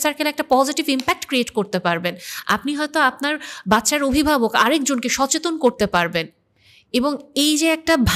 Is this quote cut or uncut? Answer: uncut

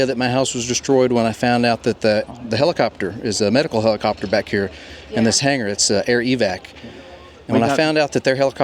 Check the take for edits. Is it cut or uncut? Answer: uncut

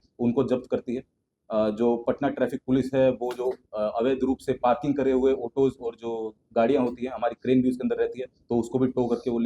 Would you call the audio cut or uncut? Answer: uncut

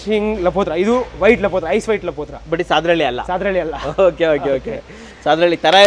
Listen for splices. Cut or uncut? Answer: uncut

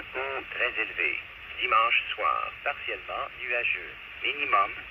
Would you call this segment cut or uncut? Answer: cut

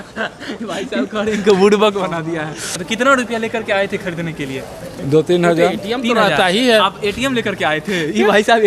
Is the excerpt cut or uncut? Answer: cut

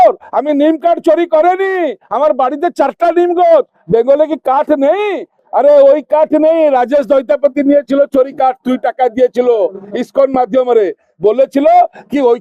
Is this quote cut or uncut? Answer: uncut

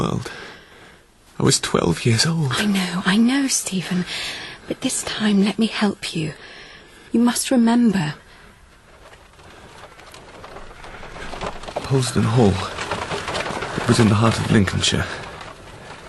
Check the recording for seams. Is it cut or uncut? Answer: uncut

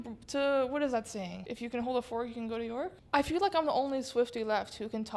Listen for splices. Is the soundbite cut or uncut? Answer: cut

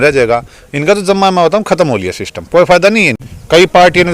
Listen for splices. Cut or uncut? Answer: cut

